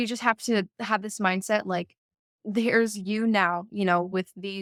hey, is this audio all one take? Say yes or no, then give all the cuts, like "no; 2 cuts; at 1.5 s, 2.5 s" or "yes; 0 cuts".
yes; 0 cuts